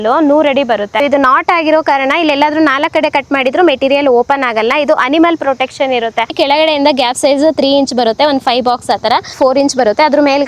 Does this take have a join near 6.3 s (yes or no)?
yes